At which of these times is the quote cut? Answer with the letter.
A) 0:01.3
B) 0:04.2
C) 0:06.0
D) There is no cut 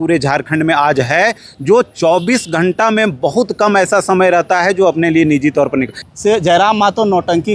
C